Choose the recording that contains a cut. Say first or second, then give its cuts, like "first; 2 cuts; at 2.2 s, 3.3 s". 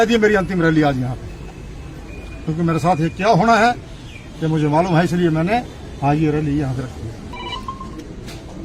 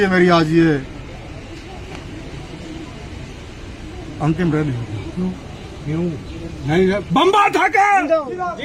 first; 1 cut; at 7.3 s